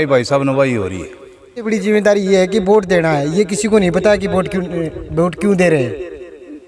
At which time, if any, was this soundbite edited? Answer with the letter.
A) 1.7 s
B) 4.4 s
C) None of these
A